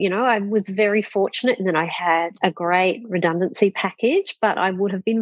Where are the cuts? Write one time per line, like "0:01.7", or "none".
0:02.3